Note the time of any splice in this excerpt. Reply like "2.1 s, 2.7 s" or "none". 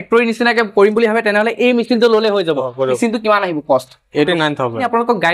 3.0 s, 4.3 s

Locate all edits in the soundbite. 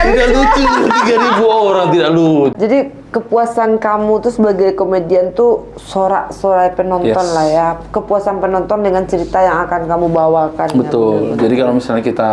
2.5 s

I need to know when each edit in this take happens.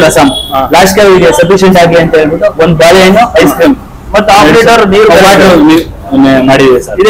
none

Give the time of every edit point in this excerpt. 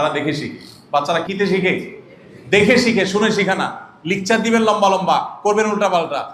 1.2 s

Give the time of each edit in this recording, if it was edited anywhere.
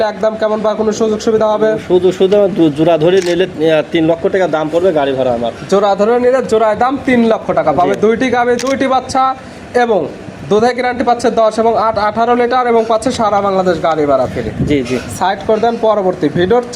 none

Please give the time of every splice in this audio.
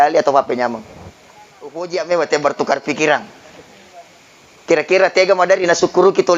1.8 s

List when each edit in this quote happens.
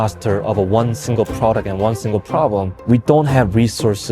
2.7 s

